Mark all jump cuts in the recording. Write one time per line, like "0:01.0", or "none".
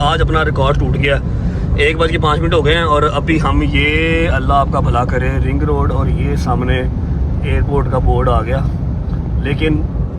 none